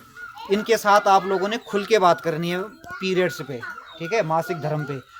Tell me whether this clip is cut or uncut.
uncut